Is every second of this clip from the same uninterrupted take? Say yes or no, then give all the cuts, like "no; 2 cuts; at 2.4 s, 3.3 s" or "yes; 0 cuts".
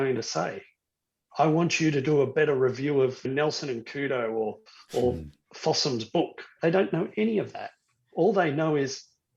no; 2 cuts; at 3.3 s, 6.4 s